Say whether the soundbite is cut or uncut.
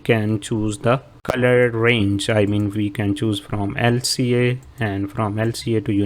cut